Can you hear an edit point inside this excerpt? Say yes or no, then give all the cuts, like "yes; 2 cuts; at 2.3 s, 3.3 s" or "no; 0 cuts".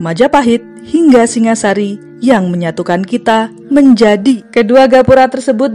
yes; 1 cut; at 4.4 s